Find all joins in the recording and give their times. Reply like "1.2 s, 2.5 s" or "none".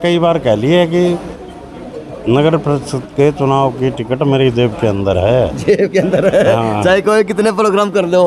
none